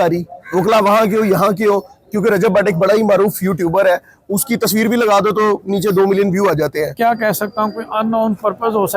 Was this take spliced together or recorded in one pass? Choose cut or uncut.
cut